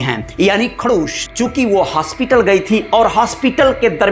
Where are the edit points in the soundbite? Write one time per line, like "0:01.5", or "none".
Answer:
0:01.2